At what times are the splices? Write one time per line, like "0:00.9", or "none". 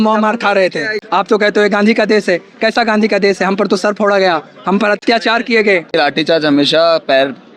0:01.0
0:05.0
0:05.9